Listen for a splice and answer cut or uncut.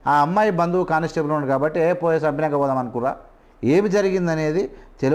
uncut